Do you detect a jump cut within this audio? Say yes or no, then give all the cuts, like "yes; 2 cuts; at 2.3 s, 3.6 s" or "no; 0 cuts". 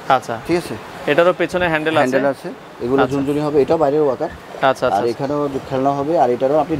no; 0 cuts